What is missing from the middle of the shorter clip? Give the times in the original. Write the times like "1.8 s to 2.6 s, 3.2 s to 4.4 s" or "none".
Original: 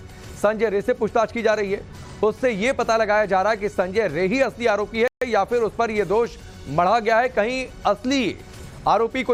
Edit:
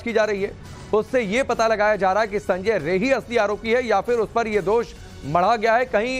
5.1 s to 5.3 s